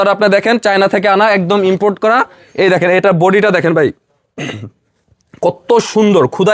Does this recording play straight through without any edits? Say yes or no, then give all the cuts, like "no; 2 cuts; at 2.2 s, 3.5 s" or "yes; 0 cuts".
yes; 0 cuts